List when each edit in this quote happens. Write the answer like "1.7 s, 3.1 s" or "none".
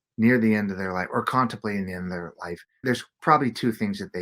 2.7 s

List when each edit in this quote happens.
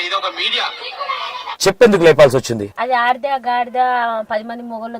1.5 s, 2.7 s

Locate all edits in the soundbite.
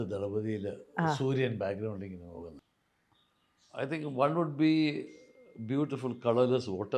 2.6 s

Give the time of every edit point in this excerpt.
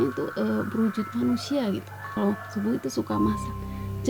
2.1 s

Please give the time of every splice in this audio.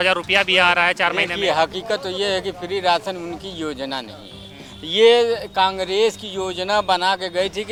none

